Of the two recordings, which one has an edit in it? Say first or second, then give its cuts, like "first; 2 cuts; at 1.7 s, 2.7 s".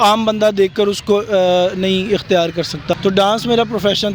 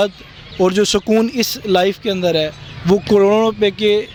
first; 1 cut; at 3.0 s